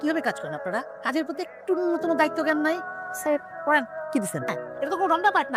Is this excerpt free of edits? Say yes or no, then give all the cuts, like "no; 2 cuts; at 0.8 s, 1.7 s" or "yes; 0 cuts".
no; 1 cut; at 4.6 s